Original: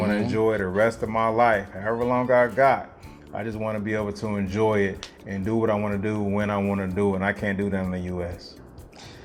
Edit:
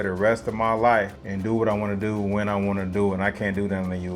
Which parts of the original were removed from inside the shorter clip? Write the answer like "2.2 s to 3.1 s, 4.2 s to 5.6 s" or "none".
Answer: 1.7 s to 5.2 s